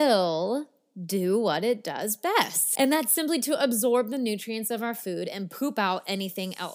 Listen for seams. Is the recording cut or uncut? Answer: cut